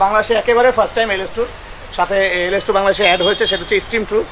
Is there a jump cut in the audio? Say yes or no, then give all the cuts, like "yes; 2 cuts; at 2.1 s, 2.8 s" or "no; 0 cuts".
no; 0 cuts